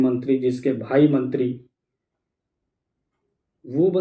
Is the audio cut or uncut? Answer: uncut